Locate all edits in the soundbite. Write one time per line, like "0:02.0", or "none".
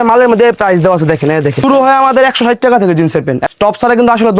0:01.6
0:03.5